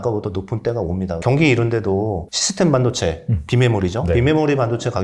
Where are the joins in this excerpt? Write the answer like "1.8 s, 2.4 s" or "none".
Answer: 1.2 s, 2.4 s